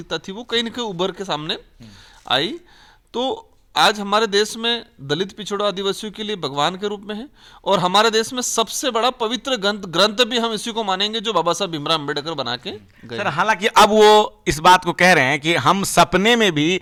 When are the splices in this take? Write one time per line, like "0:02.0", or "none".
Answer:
none